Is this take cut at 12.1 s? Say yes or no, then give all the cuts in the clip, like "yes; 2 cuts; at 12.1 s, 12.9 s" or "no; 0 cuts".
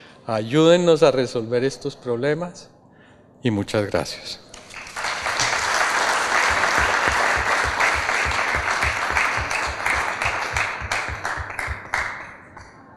no; 0 cuts